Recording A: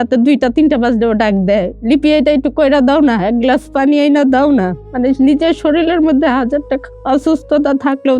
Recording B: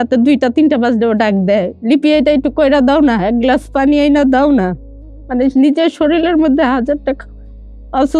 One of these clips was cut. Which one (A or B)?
A